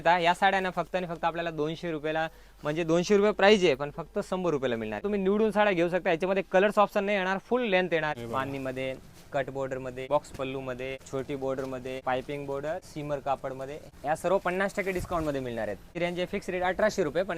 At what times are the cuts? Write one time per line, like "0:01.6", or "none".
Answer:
0:05.0
0:08.1
0:10.0
0:11.0
0:12.0
0:12.9
0:13.8
0:15.9